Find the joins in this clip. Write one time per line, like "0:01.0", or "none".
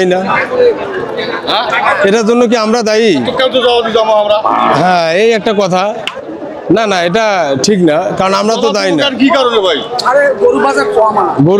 none